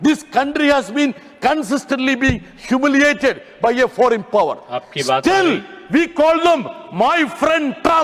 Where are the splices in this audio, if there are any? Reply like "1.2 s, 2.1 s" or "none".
none